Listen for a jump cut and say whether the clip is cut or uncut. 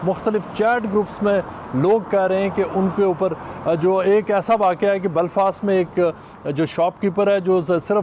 uncut